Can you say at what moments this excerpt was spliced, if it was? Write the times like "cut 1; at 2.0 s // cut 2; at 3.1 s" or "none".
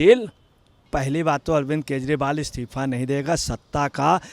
cut 1; at 0.9 s